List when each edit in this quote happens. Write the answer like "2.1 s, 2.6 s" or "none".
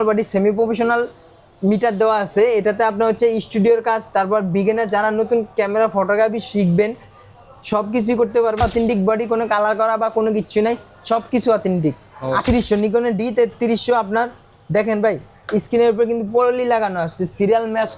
8.6 s, 12.4 s